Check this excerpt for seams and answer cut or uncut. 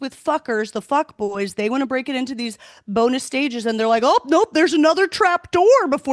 uncut